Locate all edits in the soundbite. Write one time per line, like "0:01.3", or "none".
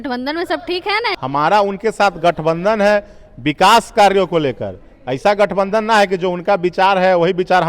0:01.1